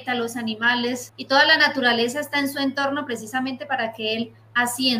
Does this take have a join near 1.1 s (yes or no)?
yes